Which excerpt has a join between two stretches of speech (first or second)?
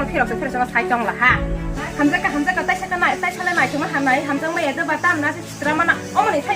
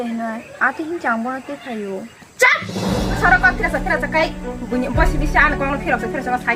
first